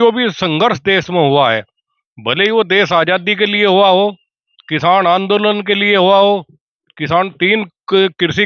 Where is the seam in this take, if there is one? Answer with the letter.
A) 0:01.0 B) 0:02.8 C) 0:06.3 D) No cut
D